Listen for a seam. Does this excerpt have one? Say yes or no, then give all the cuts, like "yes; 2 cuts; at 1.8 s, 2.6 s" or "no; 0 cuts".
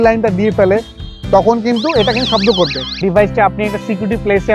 yes; 1 cut; at 2.7 s